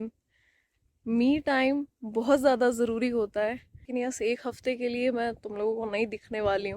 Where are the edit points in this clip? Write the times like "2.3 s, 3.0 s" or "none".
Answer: 3.9 s